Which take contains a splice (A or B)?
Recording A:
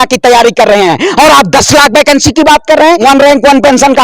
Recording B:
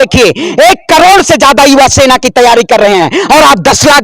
A